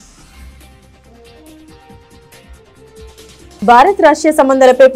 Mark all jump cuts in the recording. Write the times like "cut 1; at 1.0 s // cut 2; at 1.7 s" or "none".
cut 1; at 0.9 s // cut 2; at 2.4 s

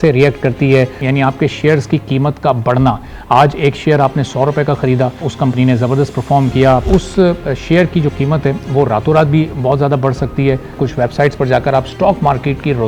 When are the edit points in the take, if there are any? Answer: cut 1; at 1.0 s // cut 2; at 5.3 s // cut 3; at 6.8 s // cut 4; at 10.8 s

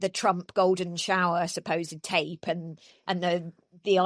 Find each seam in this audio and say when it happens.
none

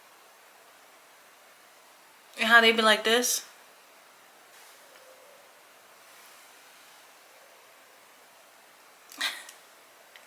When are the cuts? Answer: cut 1; at 2.3 s // cut 2; at 4.5 s

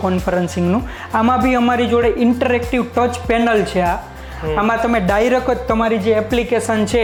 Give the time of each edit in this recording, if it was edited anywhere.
none

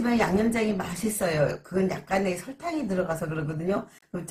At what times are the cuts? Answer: none

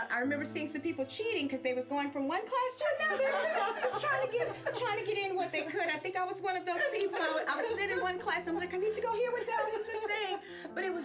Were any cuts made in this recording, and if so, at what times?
none

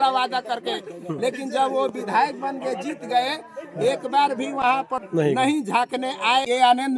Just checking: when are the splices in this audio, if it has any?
cut 1; at 5.0 s // cut 2; at 6.0 s

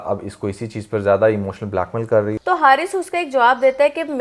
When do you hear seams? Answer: cut 1; at 2.4 s

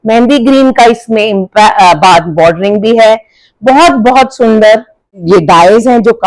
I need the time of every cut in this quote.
cut 1; at 5.2 s

